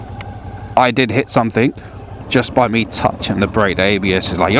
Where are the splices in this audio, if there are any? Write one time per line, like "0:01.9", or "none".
0:02.2